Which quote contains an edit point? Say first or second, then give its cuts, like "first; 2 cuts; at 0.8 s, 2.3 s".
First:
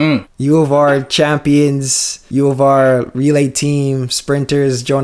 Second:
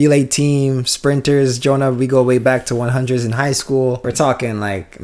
second; 1 cut; at 4.0 s